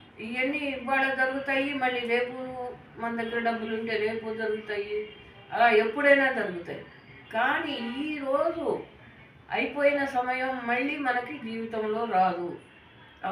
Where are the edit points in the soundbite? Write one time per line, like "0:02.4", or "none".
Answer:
none